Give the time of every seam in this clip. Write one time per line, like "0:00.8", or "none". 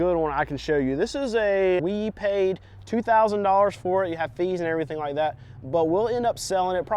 0:01.8